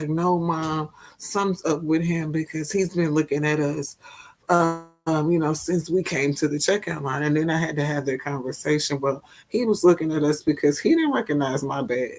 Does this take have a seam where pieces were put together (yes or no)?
no